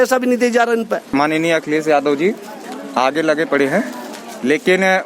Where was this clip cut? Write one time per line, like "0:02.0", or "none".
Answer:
0:01.1